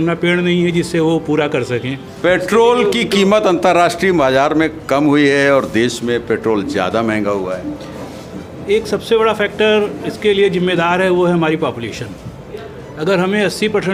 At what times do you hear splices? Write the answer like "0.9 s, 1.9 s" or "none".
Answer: none